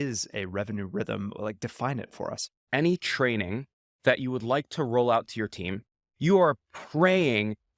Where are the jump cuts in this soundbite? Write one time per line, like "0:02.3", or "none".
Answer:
0:02.7
0:06.1